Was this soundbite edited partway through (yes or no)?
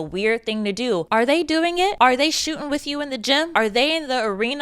yes